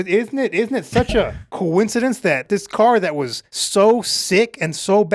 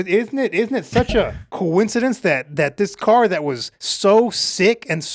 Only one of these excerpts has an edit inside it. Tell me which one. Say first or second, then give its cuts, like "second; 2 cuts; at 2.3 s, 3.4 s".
first; 1 cut; at 2.4 s